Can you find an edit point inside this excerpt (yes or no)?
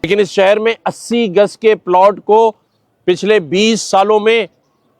no